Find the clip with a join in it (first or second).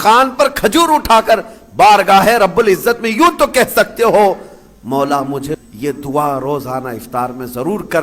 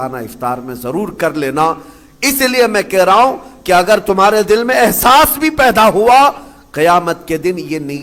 first